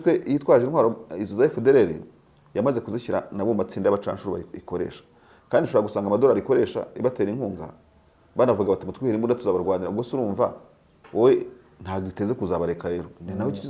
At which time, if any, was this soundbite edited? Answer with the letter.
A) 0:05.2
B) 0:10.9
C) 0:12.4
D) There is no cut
D